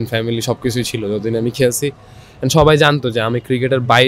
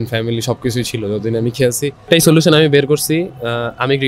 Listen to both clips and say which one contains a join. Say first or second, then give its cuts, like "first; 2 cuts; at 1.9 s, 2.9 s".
second; 1 cut; at 2.1 s